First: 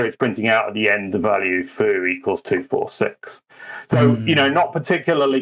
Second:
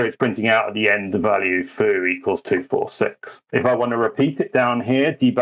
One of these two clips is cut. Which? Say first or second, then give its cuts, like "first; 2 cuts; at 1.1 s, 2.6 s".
second; 1 cut; at 3.3 s